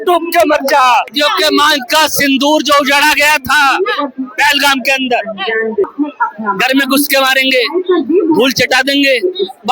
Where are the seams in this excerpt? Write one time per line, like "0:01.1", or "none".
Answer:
0:01.1
0:05.8